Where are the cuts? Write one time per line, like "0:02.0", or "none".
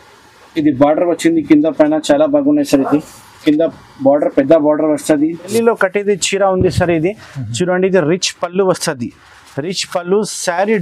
0:05.5